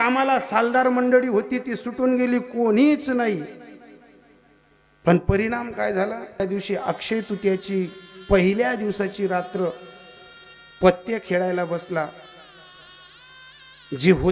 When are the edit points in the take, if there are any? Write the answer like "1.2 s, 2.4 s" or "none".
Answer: 6.4 s